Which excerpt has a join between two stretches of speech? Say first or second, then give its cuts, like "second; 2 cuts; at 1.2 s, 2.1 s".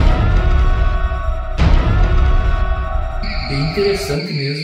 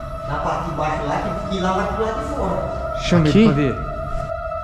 first; 1 cut; at 3.4 s